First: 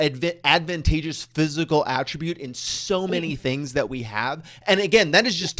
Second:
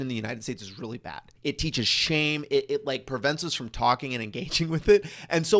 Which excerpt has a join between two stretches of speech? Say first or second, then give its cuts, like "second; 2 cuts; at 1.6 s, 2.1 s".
second; 1 cut; at 1.3 s